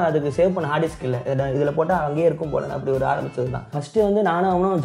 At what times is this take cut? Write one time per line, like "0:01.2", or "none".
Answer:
0:03.8